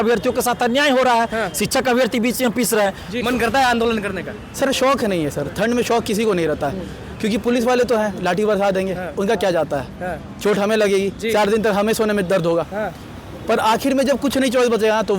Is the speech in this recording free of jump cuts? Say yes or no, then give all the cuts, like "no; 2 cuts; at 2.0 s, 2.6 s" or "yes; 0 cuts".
no; 1 cut; at 3.1 s